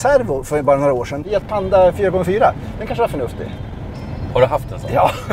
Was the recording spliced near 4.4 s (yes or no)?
no